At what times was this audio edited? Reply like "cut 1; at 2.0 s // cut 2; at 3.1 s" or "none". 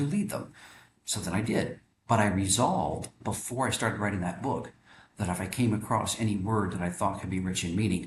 none